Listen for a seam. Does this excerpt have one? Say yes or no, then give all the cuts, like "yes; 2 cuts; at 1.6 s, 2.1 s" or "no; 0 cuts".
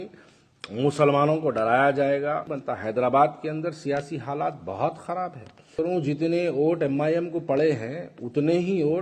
yes; 2 cuts; at 2.5 s, 5.7 s